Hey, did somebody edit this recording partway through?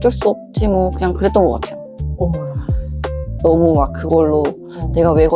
no; 0 cuts

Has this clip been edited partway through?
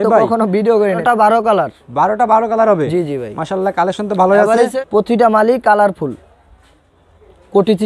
yes; 2 cuts; at 1.0 s, 4.8 s

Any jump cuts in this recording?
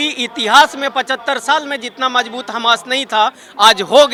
no; 0 cuts

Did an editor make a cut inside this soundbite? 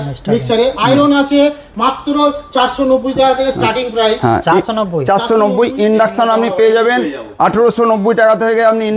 no; 0 cuts

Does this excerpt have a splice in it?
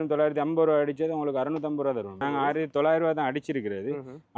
yes; 1 cut; at 2.2 s

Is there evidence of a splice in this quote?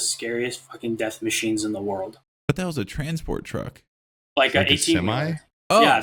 yes; 1 cut; at 2.3 s

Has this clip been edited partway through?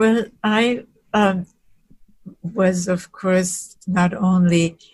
no; 0 cuts

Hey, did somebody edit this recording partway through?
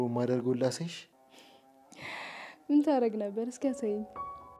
no; 0 cuts

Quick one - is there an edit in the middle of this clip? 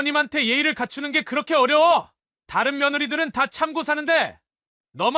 no; 0 cuts

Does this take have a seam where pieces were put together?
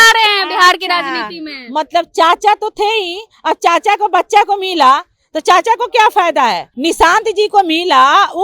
yes; 1 cut; at 6.7 s

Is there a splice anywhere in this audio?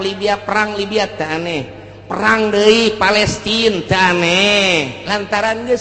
no; 0 cuts

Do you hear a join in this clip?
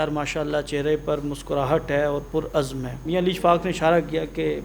yes; 1 cut; at 3.0 s

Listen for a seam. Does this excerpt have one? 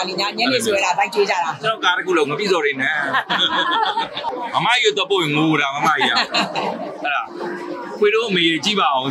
yes; 1 cut; at 4.3 s

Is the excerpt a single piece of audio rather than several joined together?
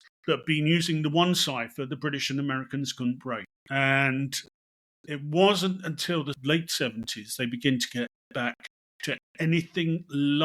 no; 2 cuts; at 3.5 s, 6.4 s

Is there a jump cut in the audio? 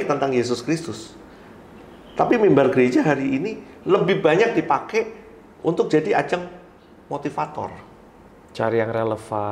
no; 0 cuts

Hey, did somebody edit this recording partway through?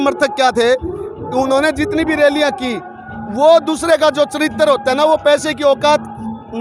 no; 0 cuts

